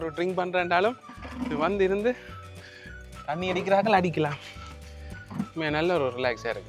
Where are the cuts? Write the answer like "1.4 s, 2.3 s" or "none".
none